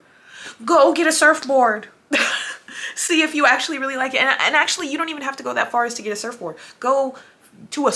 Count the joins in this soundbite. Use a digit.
0